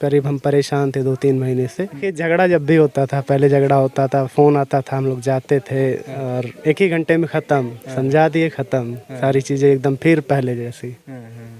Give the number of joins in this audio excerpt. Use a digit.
1